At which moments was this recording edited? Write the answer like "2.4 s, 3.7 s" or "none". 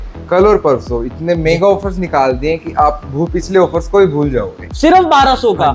4.6 s

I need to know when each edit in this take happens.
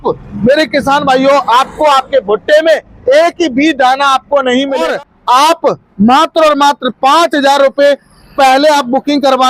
4.9 s

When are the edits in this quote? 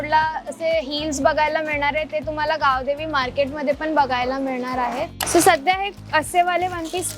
5.2 s

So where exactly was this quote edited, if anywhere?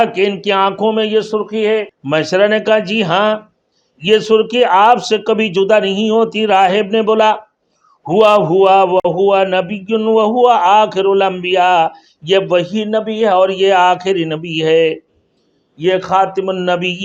2.0 s

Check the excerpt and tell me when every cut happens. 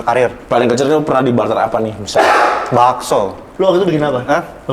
3.4 s

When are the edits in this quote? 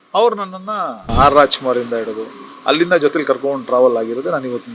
1.1 s

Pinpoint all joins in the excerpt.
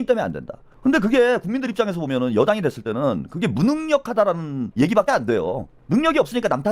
4.6 s

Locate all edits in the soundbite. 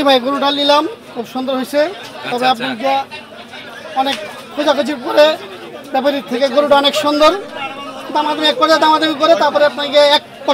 none

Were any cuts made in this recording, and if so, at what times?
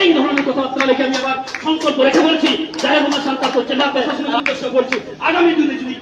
4.2 s

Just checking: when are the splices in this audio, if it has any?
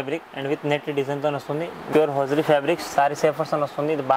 1.9 s

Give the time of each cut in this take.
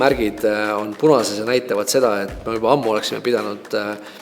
none

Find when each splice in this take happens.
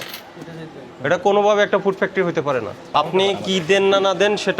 2.8 s

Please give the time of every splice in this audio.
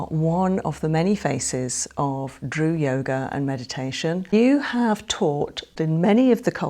4.3 s, 5.7 s

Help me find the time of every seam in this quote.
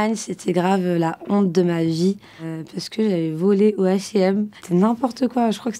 none

